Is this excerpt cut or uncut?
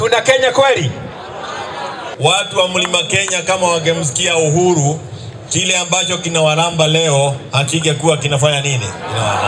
cut